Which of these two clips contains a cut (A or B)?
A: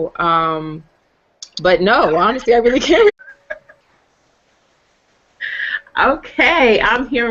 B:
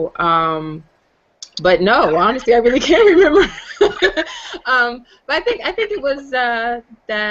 B